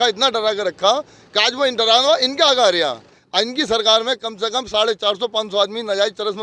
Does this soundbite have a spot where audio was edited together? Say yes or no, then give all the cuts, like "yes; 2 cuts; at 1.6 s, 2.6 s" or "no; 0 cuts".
yes; 1 cut; at 3.1 s